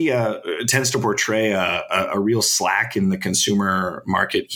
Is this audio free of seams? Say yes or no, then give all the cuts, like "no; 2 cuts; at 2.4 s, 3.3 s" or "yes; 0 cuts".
yes; 0 cuts